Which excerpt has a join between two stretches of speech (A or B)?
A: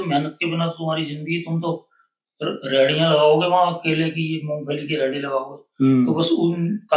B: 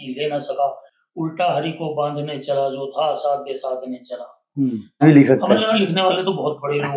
B